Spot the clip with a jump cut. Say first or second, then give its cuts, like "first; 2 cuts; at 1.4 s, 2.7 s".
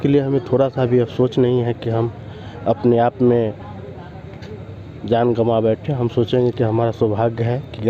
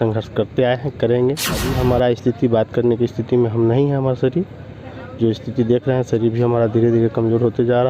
second; 1 cut; at 1.7 s